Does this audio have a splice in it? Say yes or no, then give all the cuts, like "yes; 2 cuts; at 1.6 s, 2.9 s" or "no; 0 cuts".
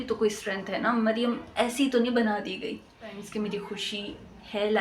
yes; 1 cut; at 3.2 s